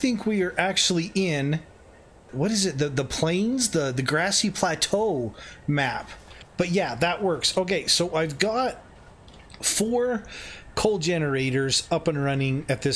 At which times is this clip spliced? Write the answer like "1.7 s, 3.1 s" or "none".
2.3 s, 6.4 s